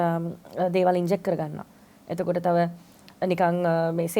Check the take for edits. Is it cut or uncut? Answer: uncut